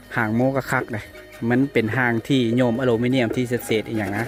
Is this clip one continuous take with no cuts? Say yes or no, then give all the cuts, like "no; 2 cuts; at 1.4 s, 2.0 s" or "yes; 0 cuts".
yes; 0 cuts